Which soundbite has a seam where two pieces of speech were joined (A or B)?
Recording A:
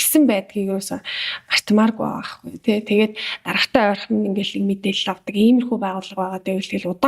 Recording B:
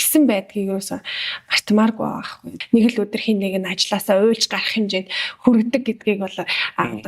B